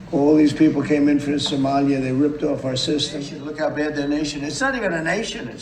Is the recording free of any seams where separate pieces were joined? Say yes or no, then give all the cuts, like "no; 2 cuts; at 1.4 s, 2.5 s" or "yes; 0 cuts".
no; 1 cut; at 3.4 s